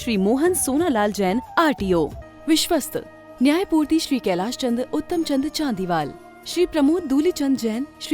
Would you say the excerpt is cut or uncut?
cut